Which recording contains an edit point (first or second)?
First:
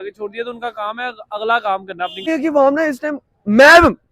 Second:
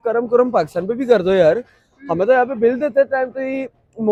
first